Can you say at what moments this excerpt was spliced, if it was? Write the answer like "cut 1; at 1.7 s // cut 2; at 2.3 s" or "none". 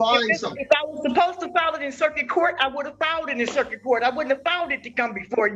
none

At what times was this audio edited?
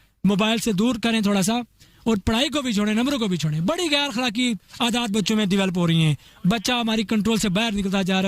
none

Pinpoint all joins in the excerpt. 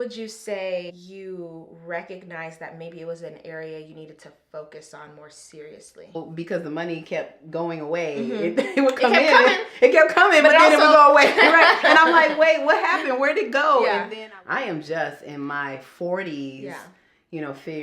cut 1; at 1.0 s // cut 2; at 6.2 s // cut 3; at 14.1 s

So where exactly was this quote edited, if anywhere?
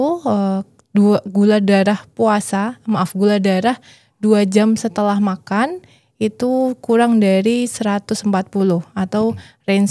none

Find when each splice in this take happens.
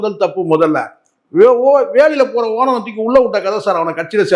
none

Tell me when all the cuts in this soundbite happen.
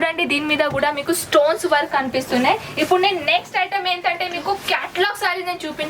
none

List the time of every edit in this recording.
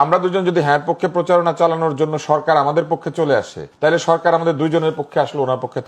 cut 1; at 3.6 s

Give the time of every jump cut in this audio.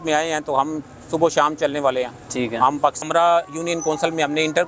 cut 1; at 3.0 s

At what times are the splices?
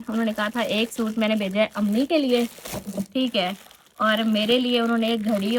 none

